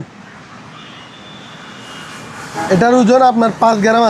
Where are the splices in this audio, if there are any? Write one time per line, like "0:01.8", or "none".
none